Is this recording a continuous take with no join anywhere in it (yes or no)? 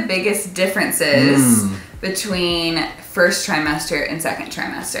yes